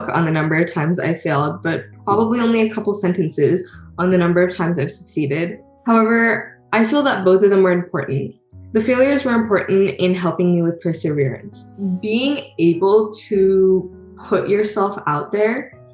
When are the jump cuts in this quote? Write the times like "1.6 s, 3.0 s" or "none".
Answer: 11.7 s